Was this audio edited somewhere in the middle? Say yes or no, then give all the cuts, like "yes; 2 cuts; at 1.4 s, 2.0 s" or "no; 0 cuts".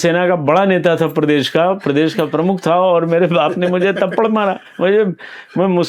no; 0 cuts